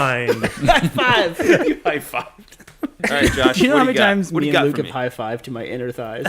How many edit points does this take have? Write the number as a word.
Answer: one